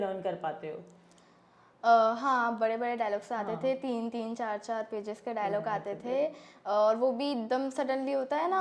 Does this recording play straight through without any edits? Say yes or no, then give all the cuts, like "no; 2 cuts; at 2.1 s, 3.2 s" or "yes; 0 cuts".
yes; 0 cuts